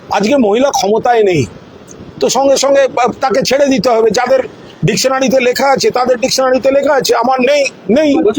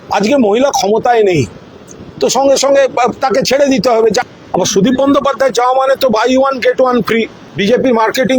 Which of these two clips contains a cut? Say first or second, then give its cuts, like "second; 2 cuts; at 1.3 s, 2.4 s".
second; 2 cuts; at 4.2 s, 7.4 s